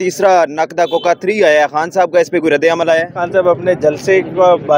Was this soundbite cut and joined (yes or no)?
yes